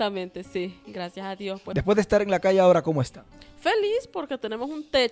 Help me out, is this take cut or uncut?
cut